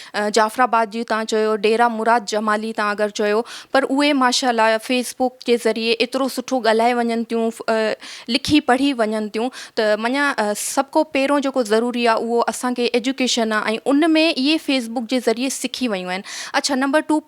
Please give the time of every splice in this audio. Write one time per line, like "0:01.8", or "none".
none